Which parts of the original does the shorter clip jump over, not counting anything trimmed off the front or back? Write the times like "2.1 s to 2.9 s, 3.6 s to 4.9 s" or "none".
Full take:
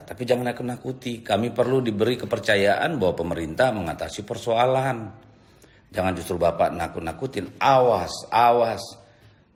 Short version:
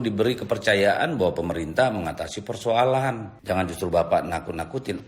5.1 s to 5.8 s